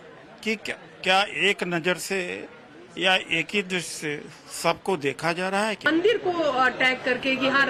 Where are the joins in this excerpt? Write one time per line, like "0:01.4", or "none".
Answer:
none